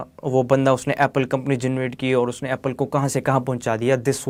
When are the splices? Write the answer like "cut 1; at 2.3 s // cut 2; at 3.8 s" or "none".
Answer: none